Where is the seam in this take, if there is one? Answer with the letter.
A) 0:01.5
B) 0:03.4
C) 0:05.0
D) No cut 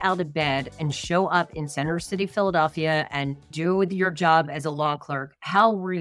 B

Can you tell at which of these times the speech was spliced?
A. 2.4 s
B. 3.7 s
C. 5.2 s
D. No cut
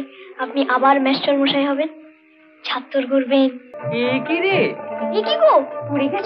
B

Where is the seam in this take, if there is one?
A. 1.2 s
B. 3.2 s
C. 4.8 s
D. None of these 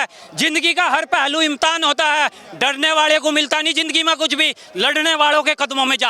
D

